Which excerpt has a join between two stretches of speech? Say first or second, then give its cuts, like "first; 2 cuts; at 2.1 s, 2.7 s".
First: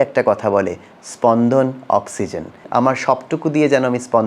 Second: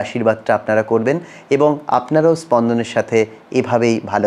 first; 1 cut; at 2.6 s